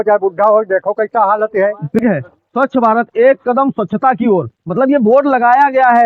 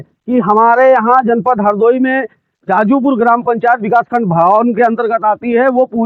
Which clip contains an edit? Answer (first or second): first